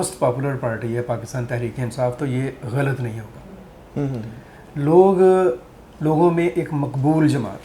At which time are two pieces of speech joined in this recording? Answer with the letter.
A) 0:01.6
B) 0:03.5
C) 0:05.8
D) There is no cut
D